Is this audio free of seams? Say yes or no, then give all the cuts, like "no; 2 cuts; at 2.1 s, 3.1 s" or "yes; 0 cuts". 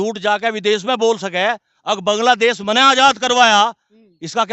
yes; 0 cuts